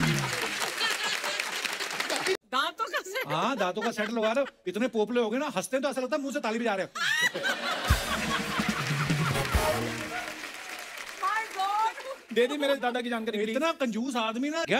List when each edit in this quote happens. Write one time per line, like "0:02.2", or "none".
0:02.4